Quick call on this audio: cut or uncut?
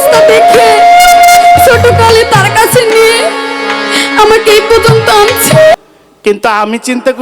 cut